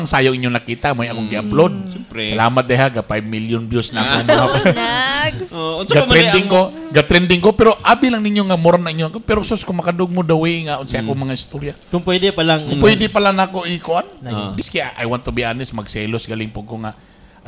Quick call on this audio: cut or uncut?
cut